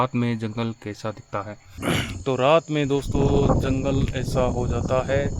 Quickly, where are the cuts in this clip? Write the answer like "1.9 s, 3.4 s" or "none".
1.6 s